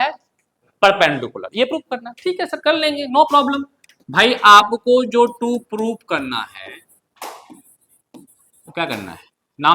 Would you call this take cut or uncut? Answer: uncut